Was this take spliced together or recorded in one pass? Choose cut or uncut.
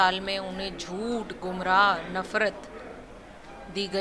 uncut